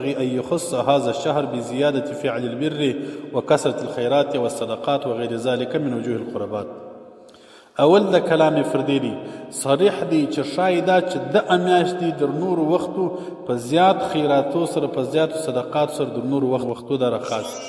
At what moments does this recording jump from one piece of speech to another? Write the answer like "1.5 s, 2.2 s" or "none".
16.6 s